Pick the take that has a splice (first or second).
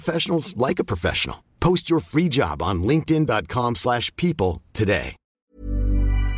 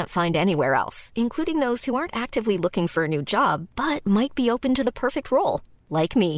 first